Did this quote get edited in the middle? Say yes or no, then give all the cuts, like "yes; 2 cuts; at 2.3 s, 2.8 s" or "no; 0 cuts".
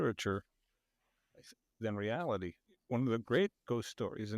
yes; 1 cut; at 2.7 s